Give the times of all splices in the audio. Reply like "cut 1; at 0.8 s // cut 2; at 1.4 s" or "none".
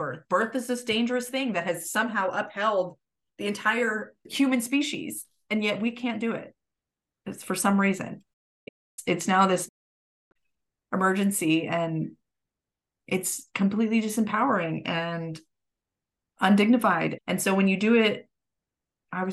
cut 1; at 4.3 s